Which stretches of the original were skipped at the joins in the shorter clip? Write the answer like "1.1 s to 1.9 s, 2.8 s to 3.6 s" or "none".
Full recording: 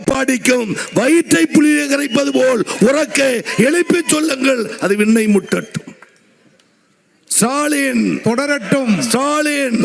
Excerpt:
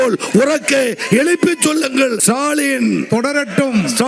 4.7 s to 7.3 s